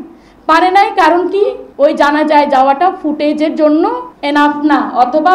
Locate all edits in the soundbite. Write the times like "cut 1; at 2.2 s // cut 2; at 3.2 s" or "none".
cut 1; at 1.6 s // cut 2; at 4.1 s